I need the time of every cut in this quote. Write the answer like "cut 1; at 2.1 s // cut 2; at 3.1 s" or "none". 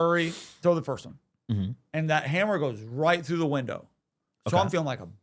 none